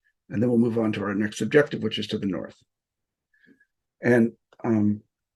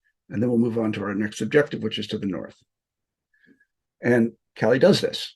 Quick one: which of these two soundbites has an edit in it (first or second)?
second